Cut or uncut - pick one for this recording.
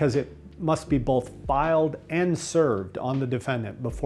uncut